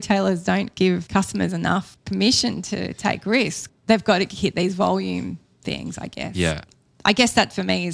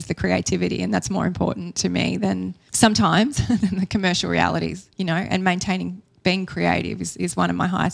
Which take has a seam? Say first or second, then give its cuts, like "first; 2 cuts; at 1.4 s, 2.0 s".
first; 4 cuts; at 1.0 s, 2.0 s, 3.6 s, 6.7 s